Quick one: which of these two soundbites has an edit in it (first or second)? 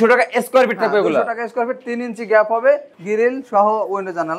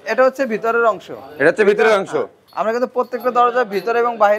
first